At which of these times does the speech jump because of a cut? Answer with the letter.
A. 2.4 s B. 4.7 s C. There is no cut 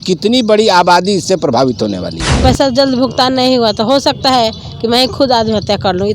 A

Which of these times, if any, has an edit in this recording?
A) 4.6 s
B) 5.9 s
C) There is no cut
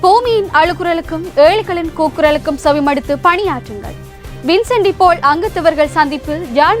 C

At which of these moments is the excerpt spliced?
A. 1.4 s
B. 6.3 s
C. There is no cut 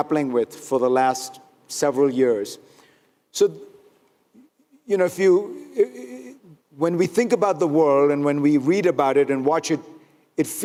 C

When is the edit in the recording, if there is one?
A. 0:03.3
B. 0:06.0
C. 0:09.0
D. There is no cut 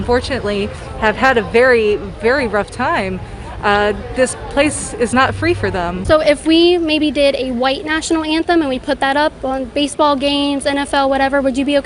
B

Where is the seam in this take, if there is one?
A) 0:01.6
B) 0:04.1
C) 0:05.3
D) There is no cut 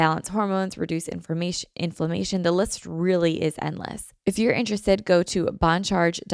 B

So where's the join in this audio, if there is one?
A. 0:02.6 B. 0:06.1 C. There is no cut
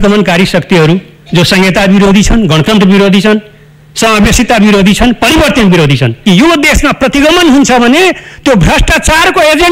B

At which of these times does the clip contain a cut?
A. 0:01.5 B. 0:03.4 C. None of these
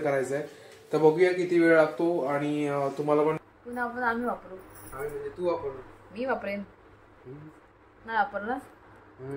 B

